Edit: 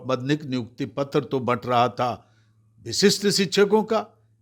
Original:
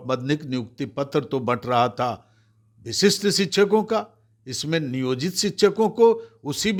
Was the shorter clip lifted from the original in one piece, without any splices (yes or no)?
yes